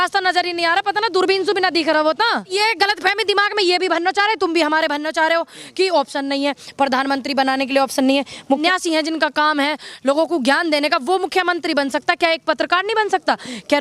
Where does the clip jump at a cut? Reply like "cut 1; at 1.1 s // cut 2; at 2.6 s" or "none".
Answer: cut 1; at 2.5 s // cut 2; at 8.6 s